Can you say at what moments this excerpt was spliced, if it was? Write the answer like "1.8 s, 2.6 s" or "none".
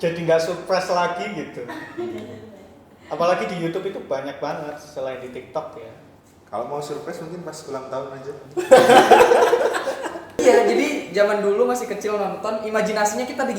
10.4 s